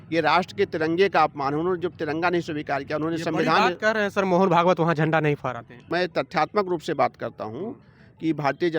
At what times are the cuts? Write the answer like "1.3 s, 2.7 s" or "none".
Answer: 5.8 s